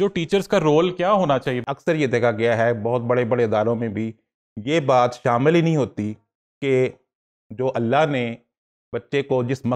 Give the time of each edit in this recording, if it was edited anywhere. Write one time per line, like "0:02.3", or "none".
0:01.6